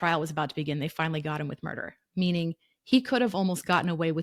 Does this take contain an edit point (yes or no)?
no